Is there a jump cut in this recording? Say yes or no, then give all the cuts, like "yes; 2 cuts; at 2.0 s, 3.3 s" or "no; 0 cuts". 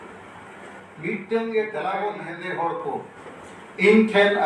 yes; 1 cut; at 1.8 s